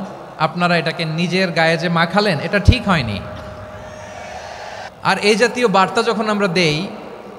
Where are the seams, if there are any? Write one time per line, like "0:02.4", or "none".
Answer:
0:04.8